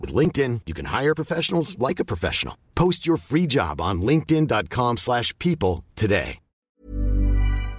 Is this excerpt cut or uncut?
cut